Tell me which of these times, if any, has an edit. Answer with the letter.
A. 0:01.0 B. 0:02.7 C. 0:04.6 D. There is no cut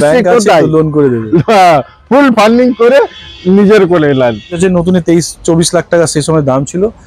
C